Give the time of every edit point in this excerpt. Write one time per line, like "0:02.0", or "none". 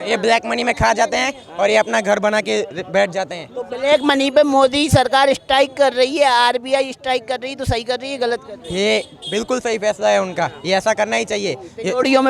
none